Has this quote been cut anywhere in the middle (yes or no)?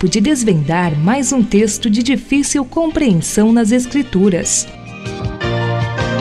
yes